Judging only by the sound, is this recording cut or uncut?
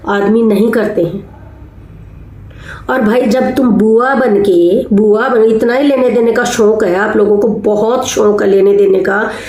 uncut